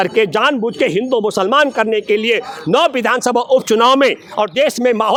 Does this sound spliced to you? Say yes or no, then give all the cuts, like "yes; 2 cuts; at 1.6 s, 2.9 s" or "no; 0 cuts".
no; 0 cuts